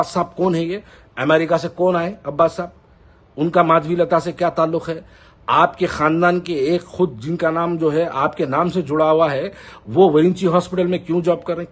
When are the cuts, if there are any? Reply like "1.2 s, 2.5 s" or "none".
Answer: none